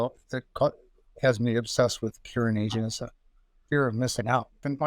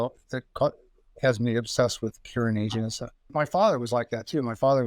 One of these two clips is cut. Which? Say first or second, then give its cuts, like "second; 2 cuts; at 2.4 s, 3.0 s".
second; 1 cut; at 3.3 s